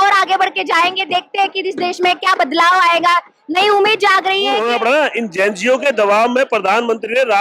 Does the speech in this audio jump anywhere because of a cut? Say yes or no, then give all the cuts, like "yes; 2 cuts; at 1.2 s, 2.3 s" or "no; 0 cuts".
yes; 1 cut; at 4.6 s